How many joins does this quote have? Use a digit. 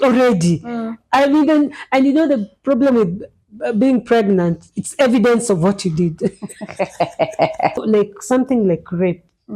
1